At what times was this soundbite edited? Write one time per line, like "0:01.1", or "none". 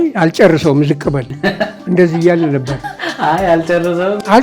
none